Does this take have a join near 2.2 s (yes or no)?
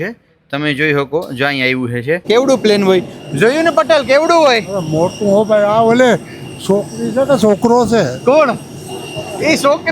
yes